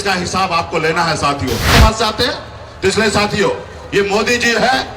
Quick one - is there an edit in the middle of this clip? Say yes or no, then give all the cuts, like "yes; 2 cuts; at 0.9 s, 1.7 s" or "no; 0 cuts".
yes; 1 cut; at 1.7 s